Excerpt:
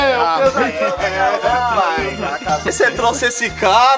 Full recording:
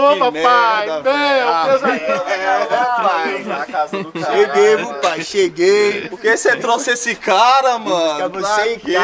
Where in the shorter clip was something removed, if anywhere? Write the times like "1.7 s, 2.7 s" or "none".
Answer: 2.7 s